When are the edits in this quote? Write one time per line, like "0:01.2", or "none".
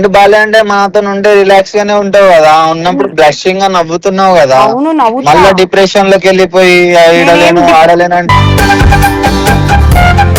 none